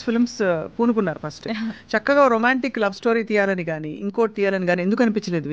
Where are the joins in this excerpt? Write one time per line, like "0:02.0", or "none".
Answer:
none